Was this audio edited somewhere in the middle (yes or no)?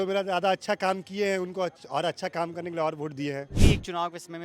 yes